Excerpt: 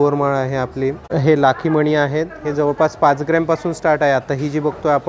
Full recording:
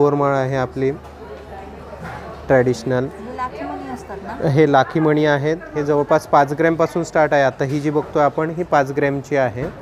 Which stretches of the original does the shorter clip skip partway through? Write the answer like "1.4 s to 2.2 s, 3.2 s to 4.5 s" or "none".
1.0 s to 4.3 s